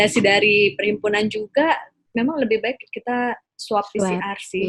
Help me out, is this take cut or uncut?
uncut